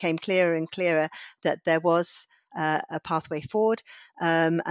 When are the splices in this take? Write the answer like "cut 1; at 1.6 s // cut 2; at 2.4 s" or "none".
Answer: none